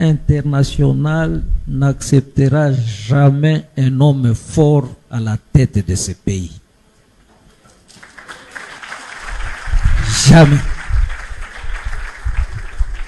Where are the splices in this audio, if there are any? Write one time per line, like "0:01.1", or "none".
none